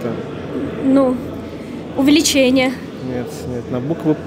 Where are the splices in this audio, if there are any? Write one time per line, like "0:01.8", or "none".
none